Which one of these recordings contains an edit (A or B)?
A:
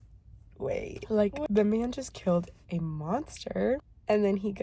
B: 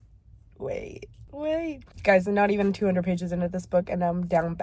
A